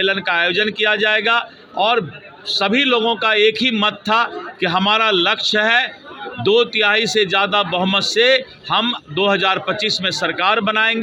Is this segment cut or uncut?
uncut